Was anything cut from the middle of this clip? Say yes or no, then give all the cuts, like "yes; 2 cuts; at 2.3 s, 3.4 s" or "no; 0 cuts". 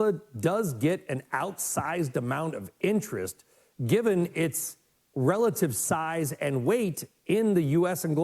no; 0 cuts